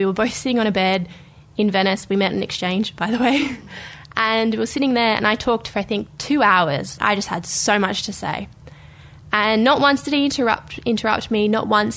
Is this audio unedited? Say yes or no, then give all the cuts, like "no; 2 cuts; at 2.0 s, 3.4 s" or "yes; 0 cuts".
yes; 0 cuts